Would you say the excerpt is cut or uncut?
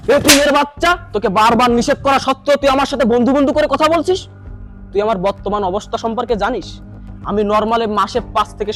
uncut